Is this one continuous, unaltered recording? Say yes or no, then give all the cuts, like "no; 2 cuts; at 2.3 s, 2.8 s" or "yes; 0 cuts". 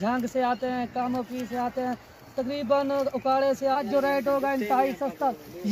no; 1 cut; at 3.8 s